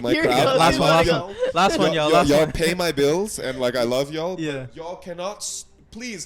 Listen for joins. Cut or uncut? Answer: uncut